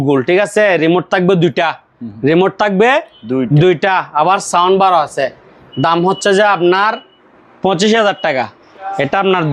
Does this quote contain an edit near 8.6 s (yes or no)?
yes